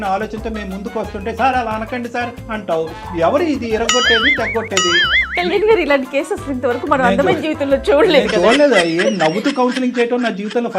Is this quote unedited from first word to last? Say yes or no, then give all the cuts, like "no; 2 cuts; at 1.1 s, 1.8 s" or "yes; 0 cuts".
yes; 0 cuts